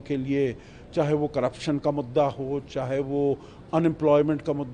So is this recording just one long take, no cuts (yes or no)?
yes